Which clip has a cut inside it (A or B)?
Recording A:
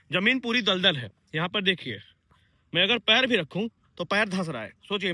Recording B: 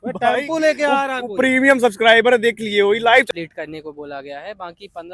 B